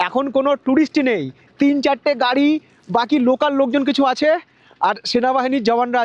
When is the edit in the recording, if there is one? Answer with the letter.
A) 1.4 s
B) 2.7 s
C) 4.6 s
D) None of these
D